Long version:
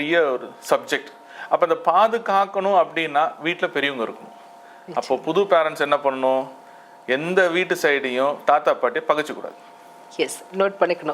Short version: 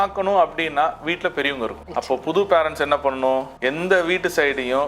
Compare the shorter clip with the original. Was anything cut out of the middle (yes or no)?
yes